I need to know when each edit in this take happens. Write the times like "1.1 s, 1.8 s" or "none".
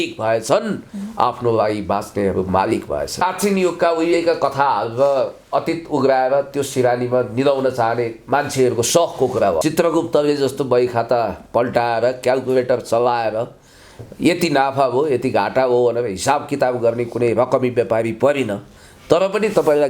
3.2 s, 9.6 s